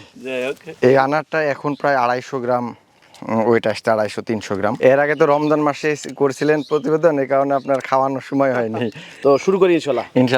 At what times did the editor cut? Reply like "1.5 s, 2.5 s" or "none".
4.7 s, 8.9 s